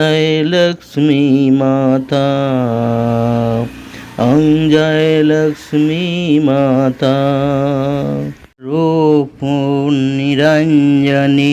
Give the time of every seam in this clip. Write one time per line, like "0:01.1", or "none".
0:08.7